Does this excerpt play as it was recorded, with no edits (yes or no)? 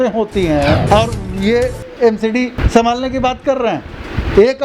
no